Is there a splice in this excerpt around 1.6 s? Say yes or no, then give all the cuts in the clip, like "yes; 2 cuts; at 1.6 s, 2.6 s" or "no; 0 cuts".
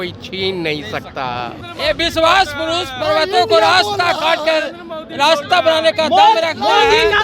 yes; 1 cut; at 1.6 s